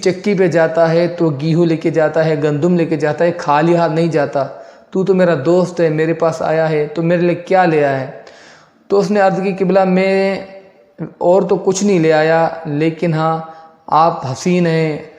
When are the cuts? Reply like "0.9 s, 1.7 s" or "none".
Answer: none